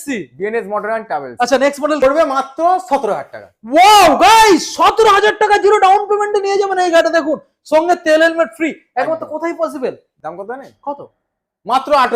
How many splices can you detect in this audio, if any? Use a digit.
2